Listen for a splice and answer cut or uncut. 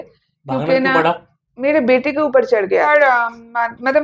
cut